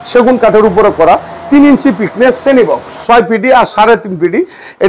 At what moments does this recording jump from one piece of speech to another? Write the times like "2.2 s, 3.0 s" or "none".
3.0 s